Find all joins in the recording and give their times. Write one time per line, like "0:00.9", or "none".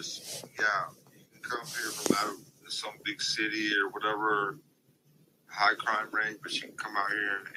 none